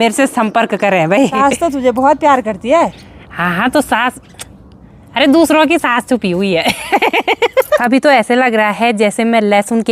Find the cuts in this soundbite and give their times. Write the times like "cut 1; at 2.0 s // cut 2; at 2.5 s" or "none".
cut 1; at 1.3 s // cut 2; at 7.8 s